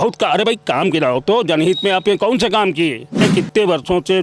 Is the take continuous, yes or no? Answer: no